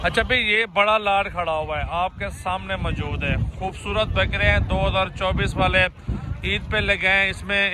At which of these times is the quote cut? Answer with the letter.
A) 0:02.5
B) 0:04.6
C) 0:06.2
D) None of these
D